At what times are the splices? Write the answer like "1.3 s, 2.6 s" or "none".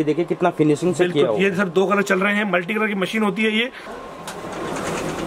3.9 s